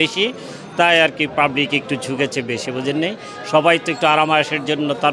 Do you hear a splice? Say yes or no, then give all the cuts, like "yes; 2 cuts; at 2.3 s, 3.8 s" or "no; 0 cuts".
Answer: no; 0 cuts